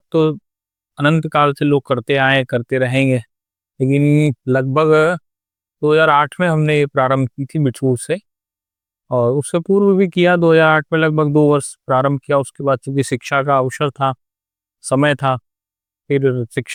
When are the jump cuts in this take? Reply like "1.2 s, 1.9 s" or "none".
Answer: none